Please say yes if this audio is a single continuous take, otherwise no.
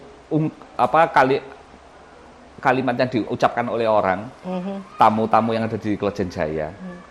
yes